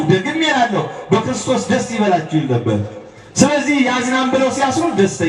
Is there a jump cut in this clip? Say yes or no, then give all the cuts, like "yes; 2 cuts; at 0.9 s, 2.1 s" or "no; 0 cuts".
no; 0 cuts